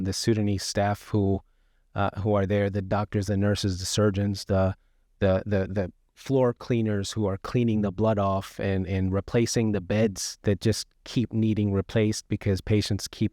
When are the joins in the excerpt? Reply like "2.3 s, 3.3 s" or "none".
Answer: 10.4 s